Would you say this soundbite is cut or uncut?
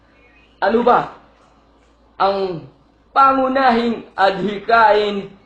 cut